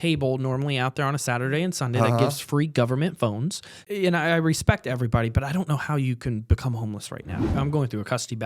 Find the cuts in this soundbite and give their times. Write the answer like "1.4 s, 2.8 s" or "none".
3.8 s, 7.5 s